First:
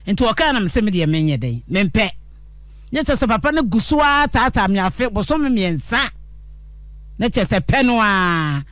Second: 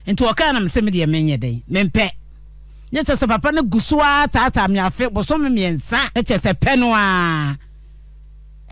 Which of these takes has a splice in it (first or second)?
second